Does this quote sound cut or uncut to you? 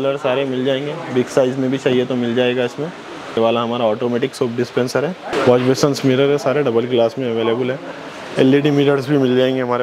cut